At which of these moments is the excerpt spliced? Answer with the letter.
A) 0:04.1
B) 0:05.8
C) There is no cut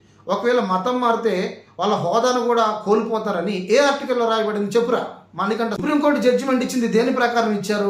B